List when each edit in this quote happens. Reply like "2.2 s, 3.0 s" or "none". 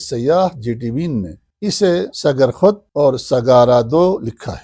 1.9 s, 2.9 s